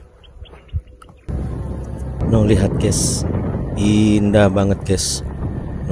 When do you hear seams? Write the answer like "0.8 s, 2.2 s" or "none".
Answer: 1.3 s